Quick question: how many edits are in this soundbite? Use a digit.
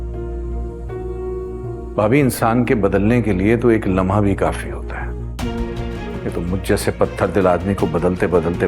1